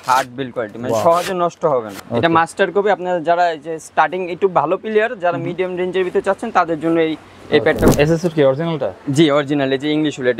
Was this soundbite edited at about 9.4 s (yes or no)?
no